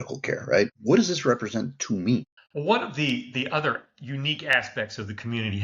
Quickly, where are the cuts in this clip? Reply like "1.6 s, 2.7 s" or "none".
2.4 s